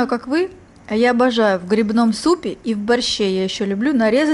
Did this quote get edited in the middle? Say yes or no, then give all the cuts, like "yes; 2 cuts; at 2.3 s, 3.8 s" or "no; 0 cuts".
no; 0 cuts